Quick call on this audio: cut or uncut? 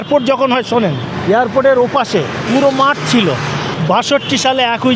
cut